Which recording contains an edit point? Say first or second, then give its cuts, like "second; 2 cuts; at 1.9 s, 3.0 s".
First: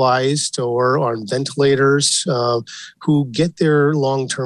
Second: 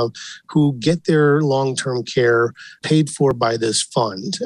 second; 1 cut; at 2.9 s